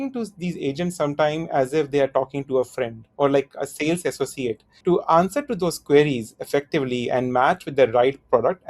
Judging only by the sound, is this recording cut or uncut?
cut